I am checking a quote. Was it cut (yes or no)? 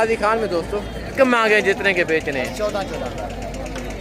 yes